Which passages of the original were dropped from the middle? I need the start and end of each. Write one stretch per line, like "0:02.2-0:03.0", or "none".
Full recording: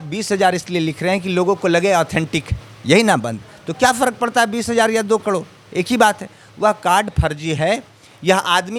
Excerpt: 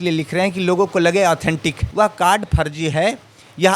0:02.5-0:06.4

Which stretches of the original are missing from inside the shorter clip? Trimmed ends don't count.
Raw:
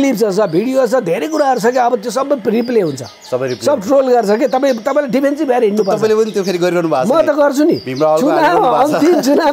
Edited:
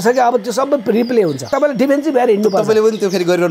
0:03.1-0:04.8

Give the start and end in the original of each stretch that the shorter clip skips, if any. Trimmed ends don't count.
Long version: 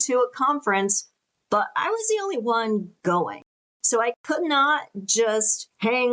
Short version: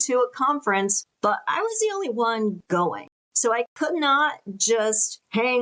0:01.0-0:01.3
0:03.1-0:03.3

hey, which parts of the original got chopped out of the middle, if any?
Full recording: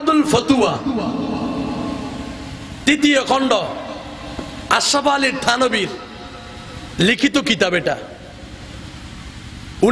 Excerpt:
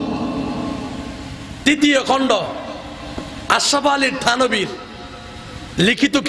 none

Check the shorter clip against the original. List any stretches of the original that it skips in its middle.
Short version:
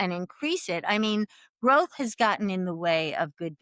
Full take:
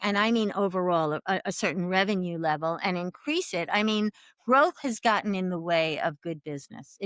none

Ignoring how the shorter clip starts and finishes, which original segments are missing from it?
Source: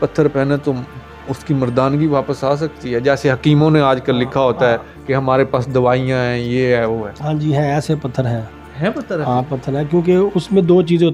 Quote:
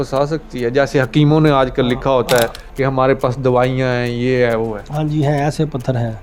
none

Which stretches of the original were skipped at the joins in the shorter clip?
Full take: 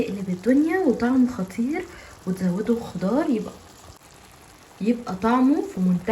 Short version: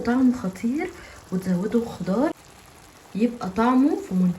0:03.3-0:04.0

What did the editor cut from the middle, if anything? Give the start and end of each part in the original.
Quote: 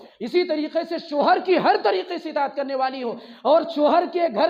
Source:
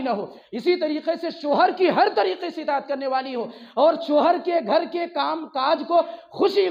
none

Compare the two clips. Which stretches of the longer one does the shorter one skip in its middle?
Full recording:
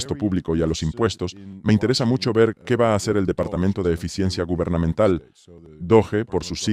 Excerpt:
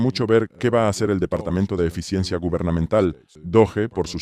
0:05.4-0:05.7

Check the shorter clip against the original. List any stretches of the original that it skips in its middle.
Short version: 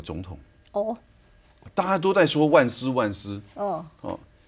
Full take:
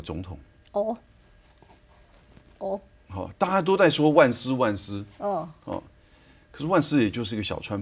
0:01.7-0:03.3

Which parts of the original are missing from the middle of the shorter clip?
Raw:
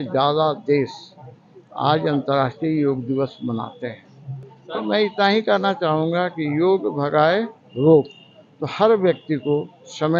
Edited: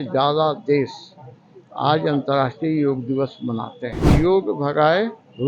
0:04.1-0:06.5

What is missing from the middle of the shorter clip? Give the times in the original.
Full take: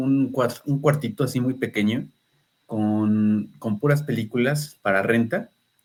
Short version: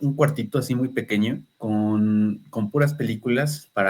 0:02.1-0:02.6

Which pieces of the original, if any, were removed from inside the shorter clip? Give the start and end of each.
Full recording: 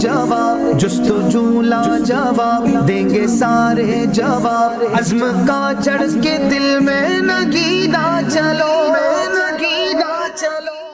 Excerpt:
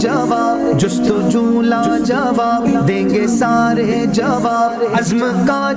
none

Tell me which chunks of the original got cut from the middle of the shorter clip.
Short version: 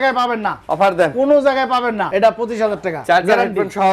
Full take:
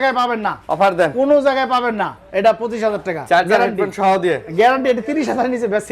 0:02.0-0:02.3

